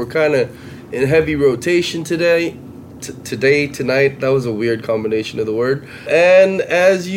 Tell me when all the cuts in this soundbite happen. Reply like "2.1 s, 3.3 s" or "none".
6.1 s